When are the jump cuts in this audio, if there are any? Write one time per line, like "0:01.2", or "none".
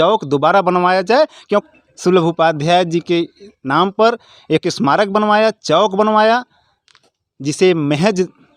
0:01.4